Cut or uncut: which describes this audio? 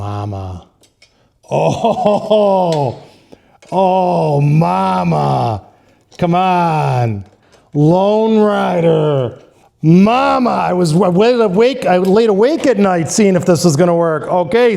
uncut